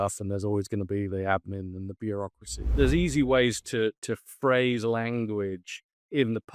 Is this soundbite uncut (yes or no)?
no